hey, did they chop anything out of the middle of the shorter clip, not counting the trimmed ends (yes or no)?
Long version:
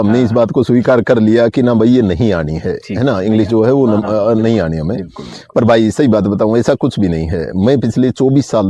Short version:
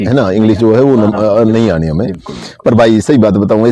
no